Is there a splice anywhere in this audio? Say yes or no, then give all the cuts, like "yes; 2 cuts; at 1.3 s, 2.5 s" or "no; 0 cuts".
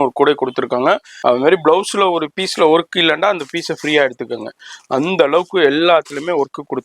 yes; 1 cut; at 1.1 s